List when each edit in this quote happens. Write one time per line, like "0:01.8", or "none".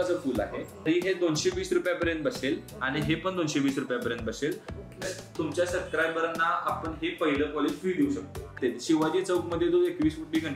0:00.9
0:05.0
0:08.5